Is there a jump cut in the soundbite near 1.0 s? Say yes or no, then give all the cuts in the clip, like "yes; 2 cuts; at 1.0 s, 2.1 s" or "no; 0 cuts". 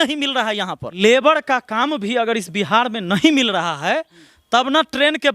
yes; 1 cut; at 1.0 s